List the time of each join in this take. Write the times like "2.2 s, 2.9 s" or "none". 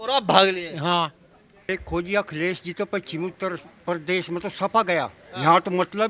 1.6 s